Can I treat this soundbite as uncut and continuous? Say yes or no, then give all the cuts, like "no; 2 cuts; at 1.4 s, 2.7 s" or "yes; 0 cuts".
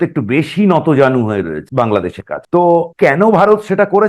no; 2 cuts; at 1.6 s, 2.9 s